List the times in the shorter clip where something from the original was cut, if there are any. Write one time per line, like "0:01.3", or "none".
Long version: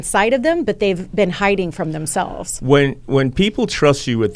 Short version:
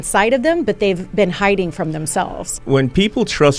0:02.6